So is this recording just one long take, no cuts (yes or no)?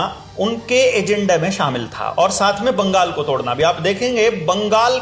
yes